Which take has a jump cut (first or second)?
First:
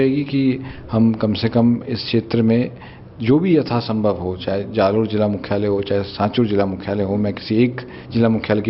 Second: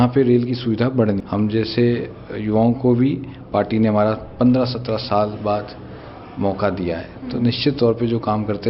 second